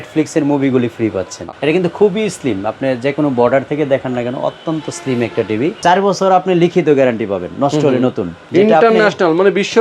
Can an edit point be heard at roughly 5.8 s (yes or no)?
yes